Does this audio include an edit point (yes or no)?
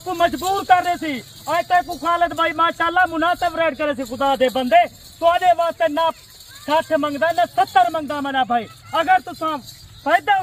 no